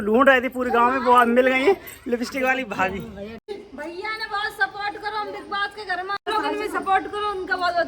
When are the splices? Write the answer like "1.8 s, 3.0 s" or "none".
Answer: 3.4 s, 6.3 s